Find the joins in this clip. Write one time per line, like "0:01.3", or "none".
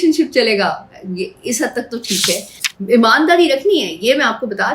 0:02.6